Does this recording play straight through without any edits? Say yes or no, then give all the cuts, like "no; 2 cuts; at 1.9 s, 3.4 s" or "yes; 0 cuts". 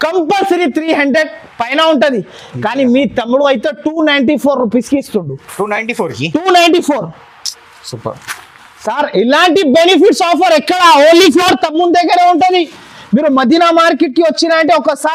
yes; 0 cuts